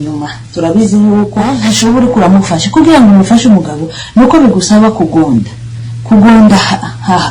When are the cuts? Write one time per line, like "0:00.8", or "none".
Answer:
0:01.6